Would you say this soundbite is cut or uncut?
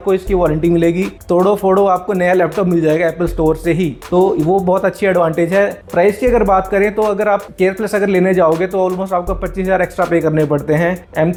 uncut